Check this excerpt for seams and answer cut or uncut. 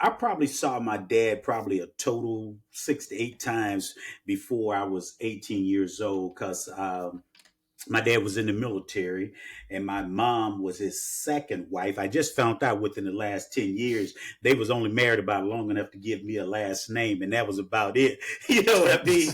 uncut